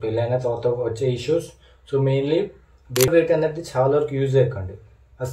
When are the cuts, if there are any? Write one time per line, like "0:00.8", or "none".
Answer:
0:03.1